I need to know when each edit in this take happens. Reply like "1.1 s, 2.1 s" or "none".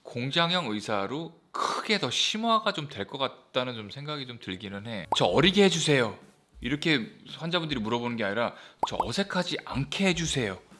5.0 s